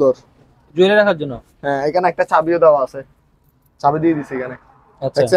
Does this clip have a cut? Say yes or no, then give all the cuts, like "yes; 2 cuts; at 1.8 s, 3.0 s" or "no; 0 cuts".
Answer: no; 0 cuts